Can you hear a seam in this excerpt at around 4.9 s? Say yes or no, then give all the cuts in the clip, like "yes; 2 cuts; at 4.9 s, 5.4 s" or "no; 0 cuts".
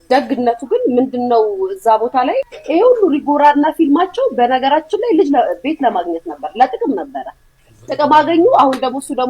no; 1 cut; at 2.6 s